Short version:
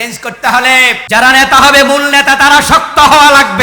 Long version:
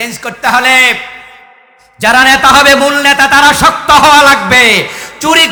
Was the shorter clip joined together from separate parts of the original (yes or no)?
yes